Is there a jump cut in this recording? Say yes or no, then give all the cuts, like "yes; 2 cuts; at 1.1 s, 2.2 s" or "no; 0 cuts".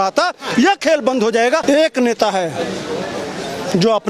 yes; 1 cut; at 1.6 s